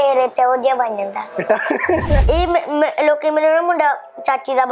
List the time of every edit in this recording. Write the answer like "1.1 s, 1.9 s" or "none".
2.1 s